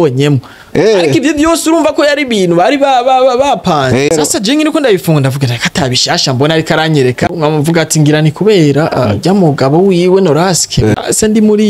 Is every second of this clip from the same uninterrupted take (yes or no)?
no